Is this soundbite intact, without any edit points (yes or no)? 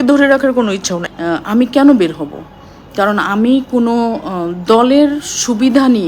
no